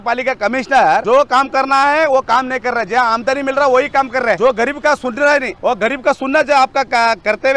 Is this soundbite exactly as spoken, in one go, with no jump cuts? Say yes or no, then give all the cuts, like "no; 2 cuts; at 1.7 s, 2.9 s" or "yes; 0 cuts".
no; 3 cuts; at 1.0 s, 4.4 s, 5.5 s